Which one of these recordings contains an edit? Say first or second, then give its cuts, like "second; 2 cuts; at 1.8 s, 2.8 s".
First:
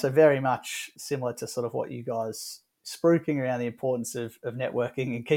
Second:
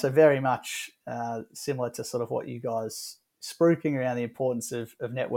first; 1 cut; at 0.9 s